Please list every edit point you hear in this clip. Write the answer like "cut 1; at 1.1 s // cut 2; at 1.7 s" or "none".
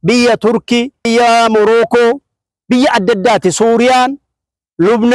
cut 1; at 1.1 s